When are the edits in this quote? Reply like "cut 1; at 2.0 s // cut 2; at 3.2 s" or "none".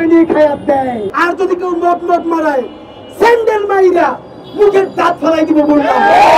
cut 1; at 1.0 s